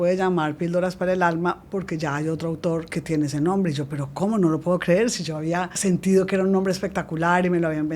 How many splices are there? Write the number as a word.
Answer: two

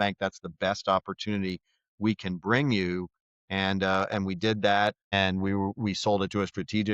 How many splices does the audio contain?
one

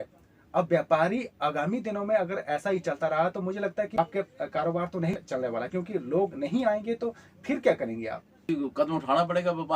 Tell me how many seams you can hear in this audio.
three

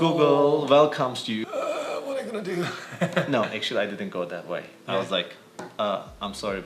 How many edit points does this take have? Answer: one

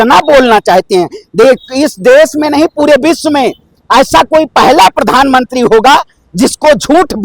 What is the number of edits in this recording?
zero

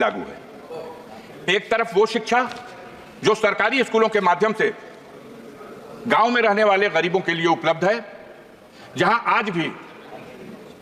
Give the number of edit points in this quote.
zero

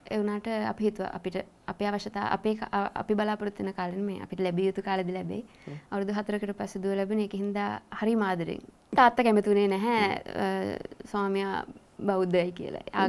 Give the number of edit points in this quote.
one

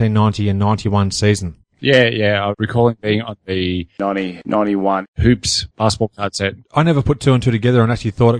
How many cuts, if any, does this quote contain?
one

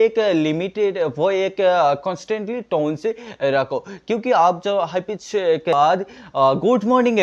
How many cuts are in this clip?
one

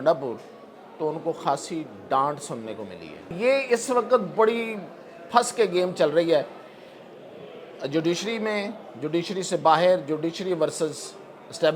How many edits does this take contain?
one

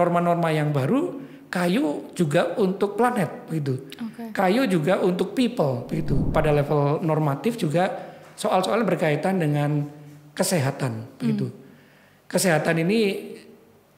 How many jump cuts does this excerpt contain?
one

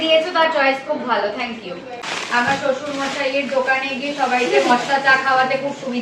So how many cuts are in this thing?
one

